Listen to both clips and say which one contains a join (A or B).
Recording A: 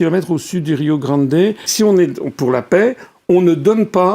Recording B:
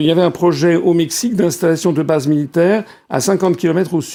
A